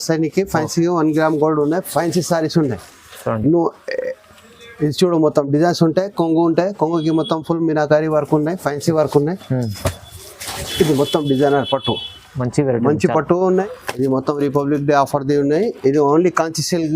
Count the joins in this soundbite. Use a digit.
1